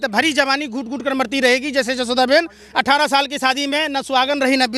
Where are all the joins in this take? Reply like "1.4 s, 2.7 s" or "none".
none